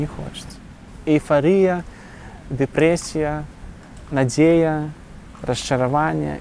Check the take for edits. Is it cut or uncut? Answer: cut